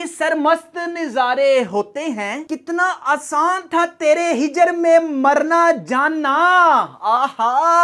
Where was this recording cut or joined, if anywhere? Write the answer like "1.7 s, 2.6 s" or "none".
2.3 s